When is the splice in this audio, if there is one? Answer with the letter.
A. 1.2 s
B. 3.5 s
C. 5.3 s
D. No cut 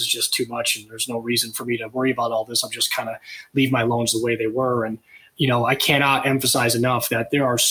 C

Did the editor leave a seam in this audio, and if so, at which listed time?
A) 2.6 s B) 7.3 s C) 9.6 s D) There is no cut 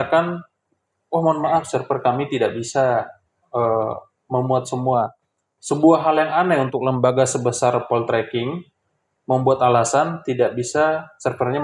D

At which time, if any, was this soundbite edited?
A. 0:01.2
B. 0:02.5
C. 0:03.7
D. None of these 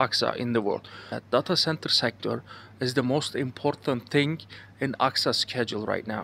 A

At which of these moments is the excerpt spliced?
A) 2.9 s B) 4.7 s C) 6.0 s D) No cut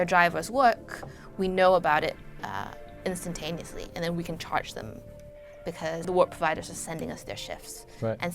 C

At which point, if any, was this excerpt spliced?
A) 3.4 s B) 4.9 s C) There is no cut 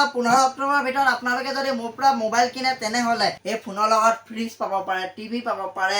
A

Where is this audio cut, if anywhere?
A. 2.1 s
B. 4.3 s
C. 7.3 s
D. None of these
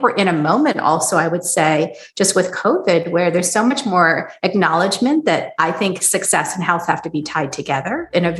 D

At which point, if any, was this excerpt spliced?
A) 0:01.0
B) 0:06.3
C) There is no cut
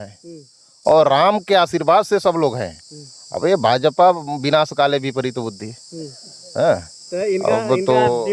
C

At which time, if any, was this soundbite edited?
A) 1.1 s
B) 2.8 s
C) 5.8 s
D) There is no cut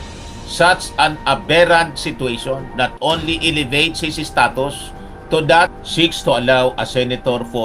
C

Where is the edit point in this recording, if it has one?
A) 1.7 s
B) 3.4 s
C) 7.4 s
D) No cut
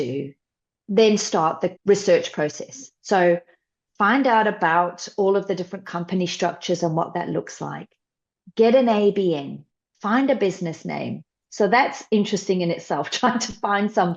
A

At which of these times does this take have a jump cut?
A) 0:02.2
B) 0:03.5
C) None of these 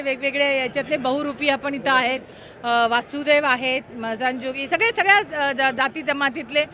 C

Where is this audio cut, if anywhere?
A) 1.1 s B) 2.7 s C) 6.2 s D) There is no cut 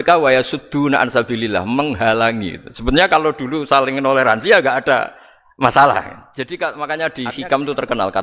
C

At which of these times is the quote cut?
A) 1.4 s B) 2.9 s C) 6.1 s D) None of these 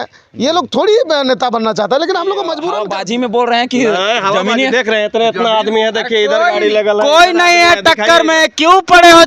B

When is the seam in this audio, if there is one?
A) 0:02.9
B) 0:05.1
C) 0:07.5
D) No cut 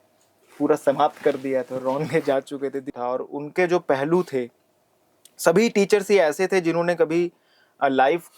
A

